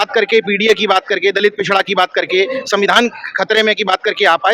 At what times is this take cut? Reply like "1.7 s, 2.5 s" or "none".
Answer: none